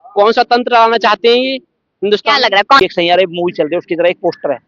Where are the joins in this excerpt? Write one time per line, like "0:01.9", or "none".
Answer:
0:02.8